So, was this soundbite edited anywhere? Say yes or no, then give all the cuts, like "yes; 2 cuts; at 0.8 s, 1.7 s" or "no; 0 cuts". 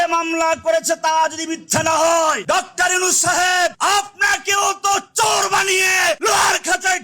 yes; 3 cuts; at 2.4 s, 3.8 s, 6.2 s